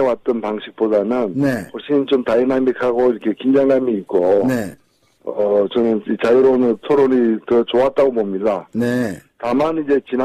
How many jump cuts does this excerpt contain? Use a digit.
1